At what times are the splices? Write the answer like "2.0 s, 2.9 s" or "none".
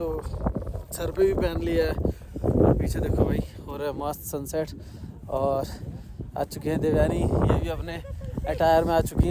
none

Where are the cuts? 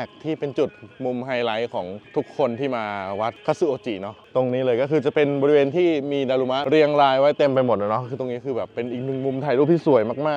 none

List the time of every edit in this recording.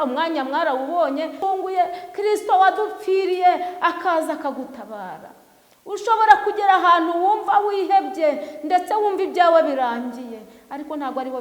1.4 s

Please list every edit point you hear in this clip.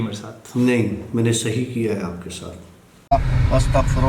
3.1 s

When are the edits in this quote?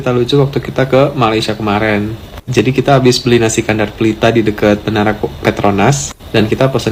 none

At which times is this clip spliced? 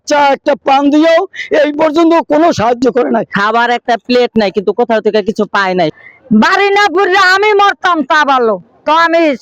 3.3 s, 5.9 s

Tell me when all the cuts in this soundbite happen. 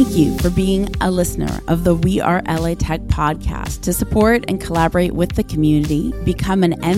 none

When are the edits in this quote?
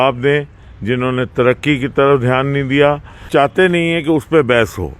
3.3 s

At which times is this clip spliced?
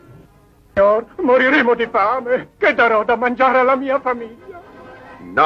1.5 s

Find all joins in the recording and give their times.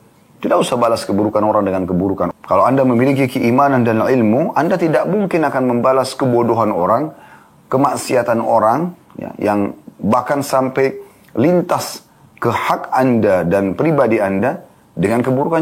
2.3 s

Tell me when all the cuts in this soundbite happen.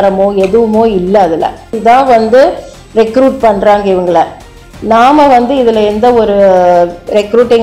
1.7 s

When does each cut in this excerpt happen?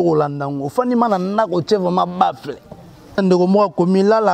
3.2 s

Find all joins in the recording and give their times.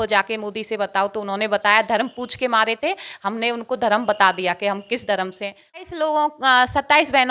5.8 s

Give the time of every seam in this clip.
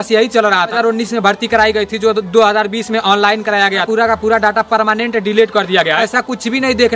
0.7 s, 3.8 s, 6.0 s

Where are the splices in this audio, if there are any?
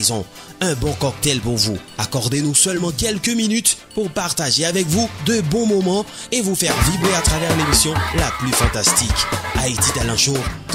none

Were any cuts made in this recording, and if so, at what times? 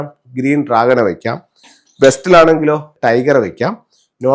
2.9 s

